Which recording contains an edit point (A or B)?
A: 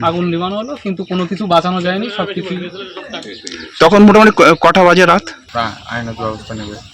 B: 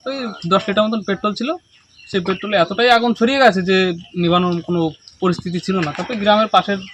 A